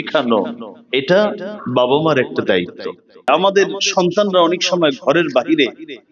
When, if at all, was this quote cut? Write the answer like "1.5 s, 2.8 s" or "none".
3.3 s